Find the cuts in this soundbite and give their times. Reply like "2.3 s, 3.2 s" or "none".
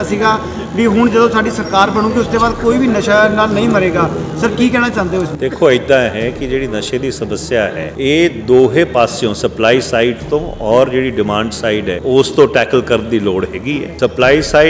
7.9 s, 12.0 s, 13.9 s